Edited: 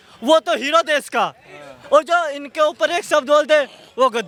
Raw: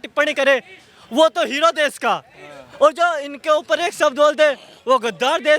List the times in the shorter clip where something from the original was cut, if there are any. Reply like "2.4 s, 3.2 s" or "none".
none